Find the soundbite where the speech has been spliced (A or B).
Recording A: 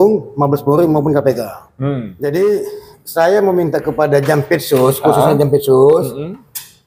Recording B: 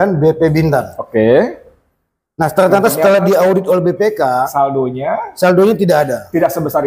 A